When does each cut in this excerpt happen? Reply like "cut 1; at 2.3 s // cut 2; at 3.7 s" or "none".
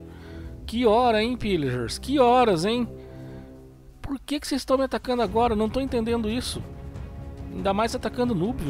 none